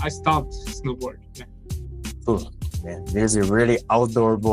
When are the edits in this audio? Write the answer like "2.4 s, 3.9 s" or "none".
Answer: none

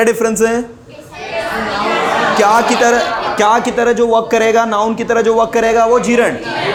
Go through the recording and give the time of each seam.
none

